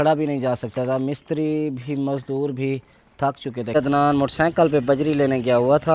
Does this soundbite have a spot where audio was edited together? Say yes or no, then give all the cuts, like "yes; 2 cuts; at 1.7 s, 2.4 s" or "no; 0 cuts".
yes; 1 cut; at 3.7 s